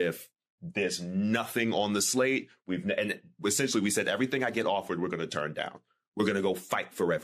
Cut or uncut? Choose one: uncut